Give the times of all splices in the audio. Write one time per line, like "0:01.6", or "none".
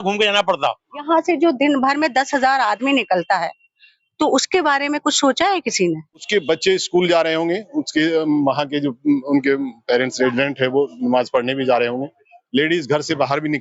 0:01.0
0:06.3